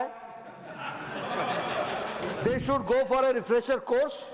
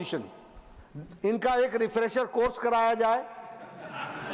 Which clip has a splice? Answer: first; 1 cut; at 2.3 s

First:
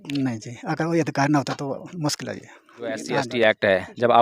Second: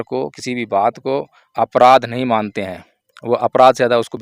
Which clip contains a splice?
first; 1 cut; at 3.0 s

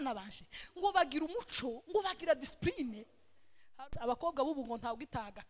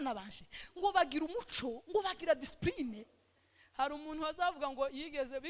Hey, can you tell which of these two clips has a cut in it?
first; 1 cut; at 3.8 s

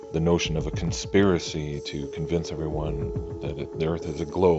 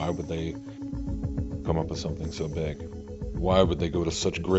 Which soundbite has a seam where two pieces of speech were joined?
first; 1 cut; at 2.5 s

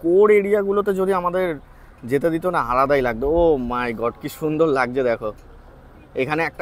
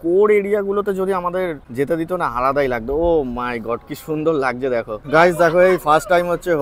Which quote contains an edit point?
second; 2 cuts; at 1.6 s, 5.0 s

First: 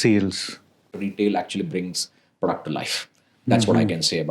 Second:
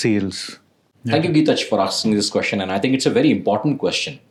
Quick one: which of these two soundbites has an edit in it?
first; 1 cut; at 1.0 s

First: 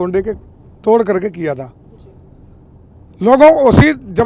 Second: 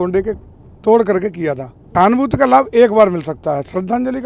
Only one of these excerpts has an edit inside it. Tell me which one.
second; 1 cut; at 1.8 s

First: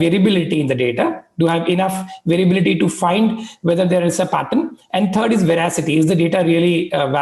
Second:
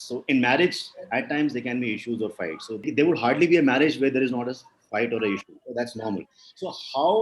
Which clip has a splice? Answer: second; 1 cut; at 2.8 s

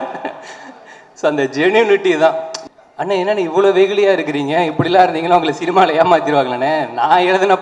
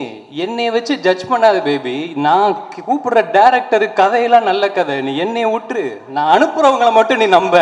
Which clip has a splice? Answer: first; 1 cut; at 2.5 s

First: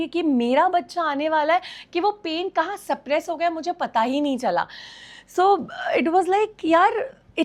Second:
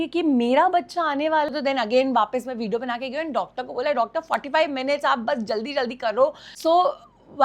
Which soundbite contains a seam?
second; 2 cuts; at 1.5 s, 6.5 s

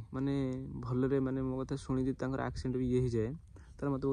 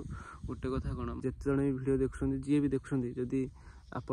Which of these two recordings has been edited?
second; 1 cut; at 1.1 s

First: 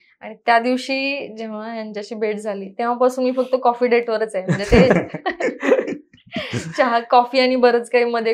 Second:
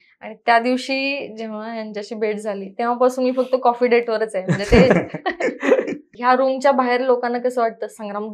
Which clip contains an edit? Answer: second; 1 cut; at 6.1 s

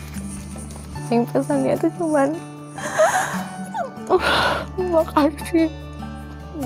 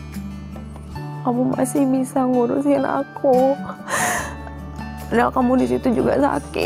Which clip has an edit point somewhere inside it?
first; 1 cut; at 1.1 s

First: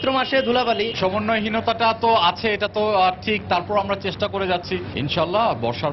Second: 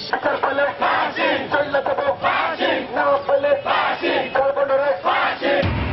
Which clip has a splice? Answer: first; 2 cuts; at 0.9 s, 4.9 s

